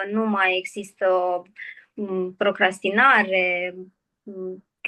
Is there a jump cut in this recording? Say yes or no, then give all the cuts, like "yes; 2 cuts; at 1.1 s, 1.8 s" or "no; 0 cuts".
no; 0 cuts